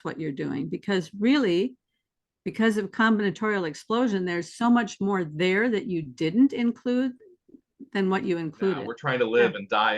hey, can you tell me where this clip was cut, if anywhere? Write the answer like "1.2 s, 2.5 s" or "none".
9.0 s